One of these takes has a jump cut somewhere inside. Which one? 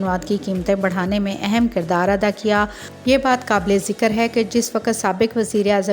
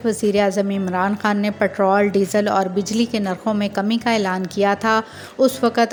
first; 1 cut; at 2.9 s

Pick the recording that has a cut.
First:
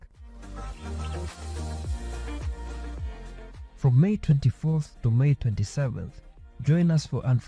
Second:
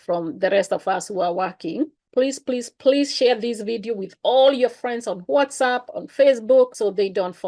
second; 1 cut; at 2.0 s

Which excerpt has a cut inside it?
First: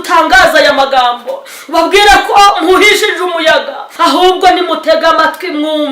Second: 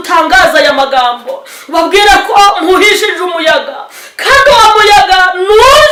first; 1 cut; at 3.9 s

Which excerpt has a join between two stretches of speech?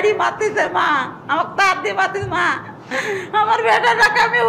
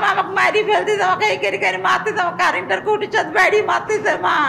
first; 1 cut; at 2.7 s

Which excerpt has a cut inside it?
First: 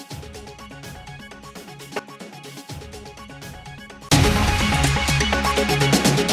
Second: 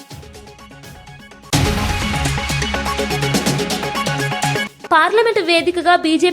second; 2 cuts; at 1.4 s, 4.6 s

